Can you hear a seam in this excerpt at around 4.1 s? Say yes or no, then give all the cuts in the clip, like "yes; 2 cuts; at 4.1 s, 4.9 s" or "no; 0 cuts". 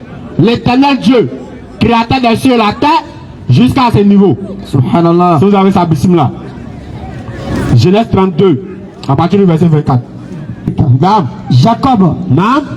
no; 1 cut; at 10.7 s